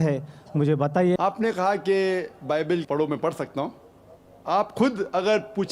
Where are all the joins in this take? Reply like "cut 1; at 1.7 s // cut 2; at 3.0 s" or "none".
cut 1; at 1.2 s